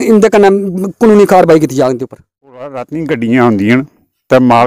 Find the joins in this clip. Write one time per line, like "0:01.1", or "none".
0:02.7

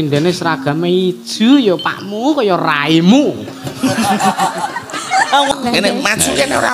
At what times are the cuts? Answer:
0:05.5

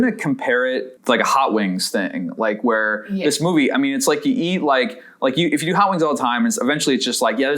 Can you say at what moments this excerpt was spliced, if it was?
0:00.9

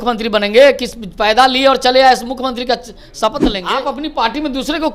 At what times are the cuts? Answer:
0:03.8

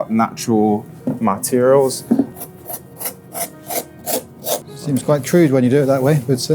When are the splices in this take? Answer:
0:02.3
0:04.7

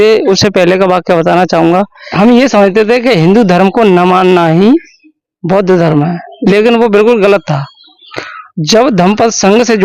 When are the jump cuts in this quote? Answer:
0:02.0

